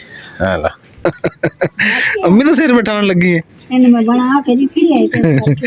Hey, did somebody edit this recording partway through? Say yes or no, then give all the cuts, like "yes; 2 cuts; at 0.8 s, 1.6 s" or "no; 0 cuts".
yes; 1 cut; at 0.9 s